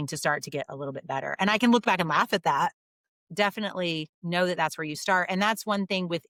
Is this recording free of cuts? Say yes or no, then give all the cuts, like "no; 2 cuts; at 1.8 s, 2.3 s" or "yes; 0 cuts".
yes; 0 cuts